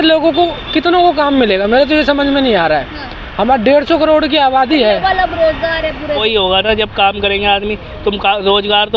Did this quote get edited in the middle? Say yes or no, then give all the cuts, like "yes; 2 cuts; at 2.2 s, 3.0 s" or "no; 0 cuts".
yes; 1 cut; at 6.2 s